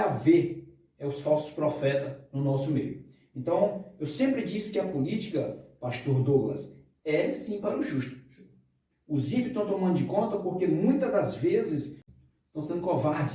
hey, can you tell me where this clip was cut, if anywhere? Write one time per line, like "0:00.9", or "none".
0:12.0